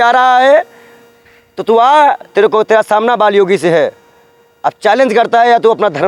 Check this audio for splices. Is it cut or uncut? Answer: uncut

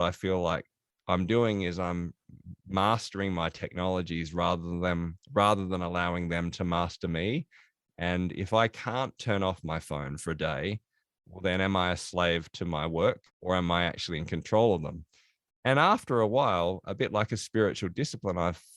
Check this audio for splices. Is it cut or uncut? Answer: cut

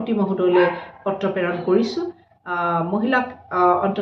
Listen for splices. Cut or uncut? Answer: uncut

